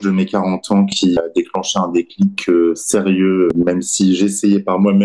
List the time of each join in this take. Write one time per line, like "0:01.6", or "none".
0:01.2
0:03.5